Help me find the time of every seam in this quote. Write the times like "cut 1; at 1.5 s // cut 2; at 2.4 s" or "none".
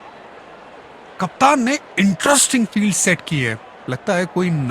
cut 1; at 1.0 s